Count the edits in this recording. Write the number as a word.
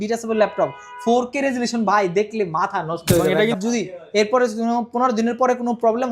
one